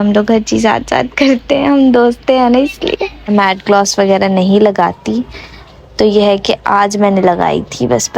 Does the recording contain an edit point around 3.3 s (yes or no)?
yes